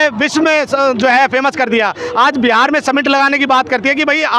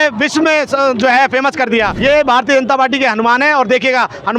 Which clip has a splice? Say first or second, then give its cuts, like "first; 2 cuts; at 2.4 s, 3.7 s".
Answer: second; 1 cut; at 1.9 s